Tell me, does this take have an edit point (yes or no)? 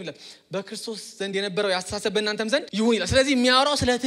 yes